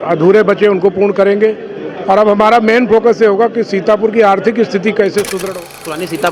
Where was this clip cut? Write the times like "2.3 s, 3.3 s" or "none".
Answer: 5.3 s